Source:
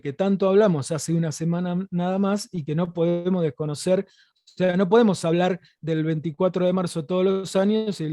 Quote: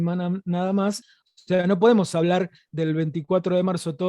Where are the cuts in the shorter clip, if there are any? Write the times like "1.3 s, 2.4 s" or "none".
1.1 s